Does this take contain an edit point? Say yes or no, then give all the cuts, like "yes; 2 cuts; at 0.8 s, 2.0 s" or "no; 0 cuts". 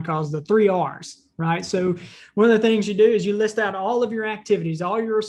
no; 0 cuts